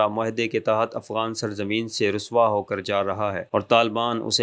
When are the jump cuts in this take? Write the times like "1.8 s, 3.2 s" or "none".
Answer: none

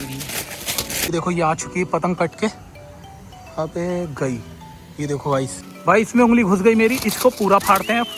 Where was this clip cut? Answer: 1.1 s, 5.7 s

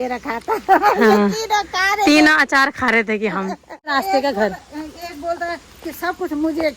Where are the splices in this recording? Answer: 3.9 s

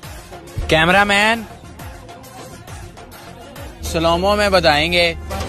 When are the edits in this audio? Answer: none

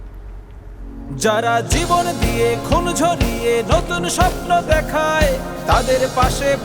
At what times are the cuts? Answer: 1.0 s

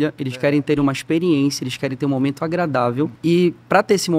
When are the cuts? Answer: 3.2 s

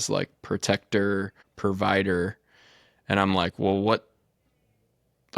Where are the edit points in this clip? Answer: 1.4 s

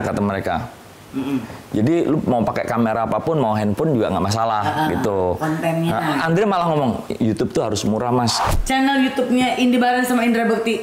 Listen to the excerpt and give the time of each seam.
8.5 s

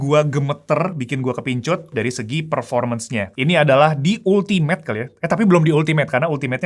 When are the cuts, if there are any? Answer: 1.9 s, 3.3 s

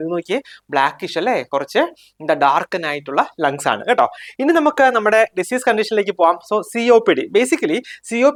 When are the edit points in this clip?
none

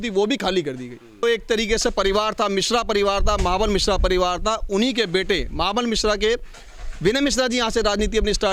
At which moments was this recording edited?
1.2 s

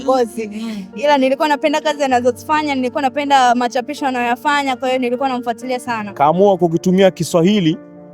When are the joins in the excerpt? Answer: 6.0 s

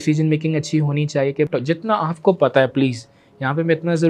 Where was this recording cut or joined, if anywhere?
1.5 s

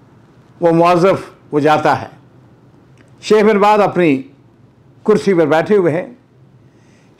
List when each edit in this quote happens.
none

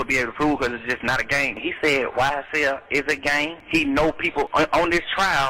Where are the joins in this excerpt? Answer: 1.6 s, 3.6 s, 4.5 s

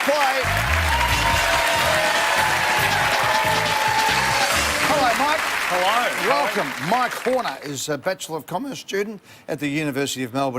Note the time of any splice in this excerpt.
0.9 s

